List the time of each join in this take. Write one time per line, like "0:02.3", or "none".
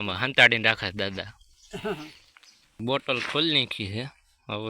0:02.8